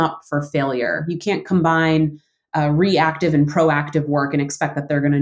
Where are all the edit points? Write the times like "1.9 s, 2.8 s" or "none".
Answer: 1.2 s